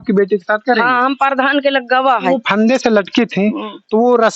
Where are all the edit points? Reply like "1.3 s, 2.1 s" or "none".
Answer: 2.4 s